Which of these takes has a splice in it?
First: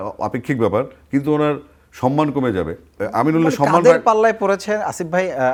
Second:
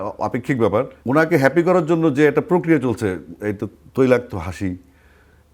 second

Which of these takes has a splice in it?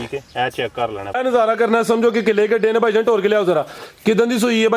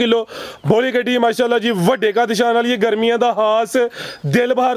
first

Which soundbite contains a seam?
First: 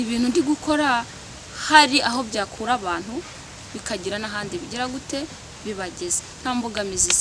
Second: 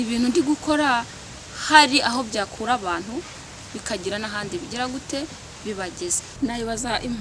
second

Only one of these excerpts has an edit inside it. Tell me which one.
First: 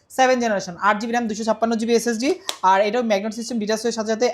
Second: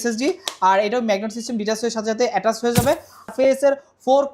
second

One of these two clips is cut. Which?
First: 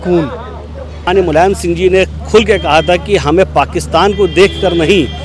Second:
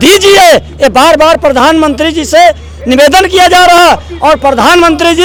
first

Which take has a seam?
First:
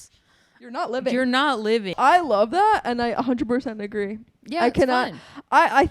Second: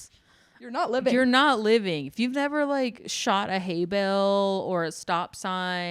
first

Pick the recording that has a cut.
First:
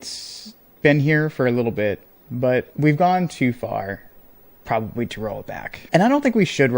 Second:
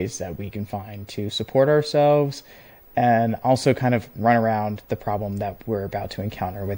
first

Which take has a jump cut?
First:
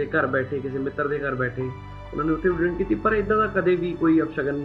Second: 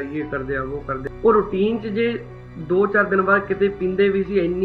second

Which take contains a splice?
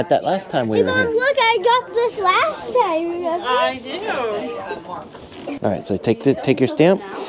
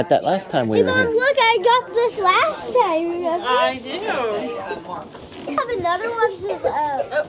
first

